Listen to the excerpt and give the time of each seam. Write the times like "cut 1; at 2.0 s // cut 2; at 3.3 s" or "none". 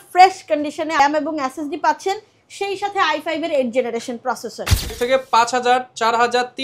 cut 1; at 1.0 s // cut 2; at 4.9 s